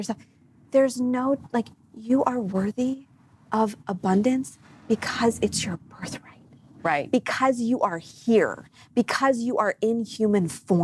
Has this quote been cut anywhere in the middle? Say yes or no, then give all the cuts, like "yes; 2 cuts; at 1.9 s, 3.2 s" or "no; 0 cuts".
no; 0 cuts